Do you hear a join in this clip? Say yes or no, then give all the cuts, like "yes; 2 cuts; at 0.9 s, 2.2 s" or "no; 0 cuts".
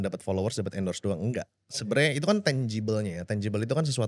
no; 0 cuts